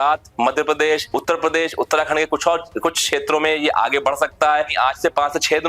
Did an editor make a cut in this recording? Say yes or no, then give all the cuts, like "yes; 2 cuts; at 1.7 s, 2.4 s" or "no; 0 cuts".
yes; 2 cuts; at 1.1 s, 4.7 s